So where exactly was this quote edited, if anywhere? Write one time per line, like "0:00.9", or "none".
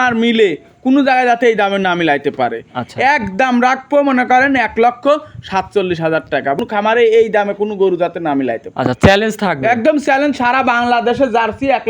0:06.6

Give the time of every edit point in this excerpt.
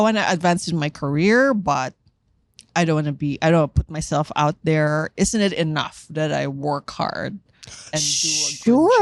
none

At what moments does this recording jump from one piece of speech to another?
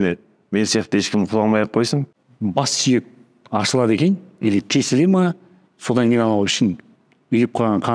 0:02.1

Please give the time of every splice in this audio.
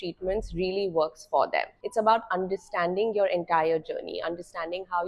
0:01.8

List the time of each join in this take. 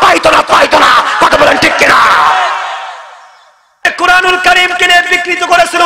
0:03.9

